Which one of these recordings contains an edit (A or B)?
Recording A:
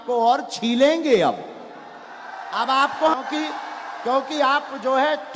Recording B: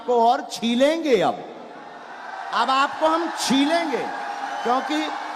A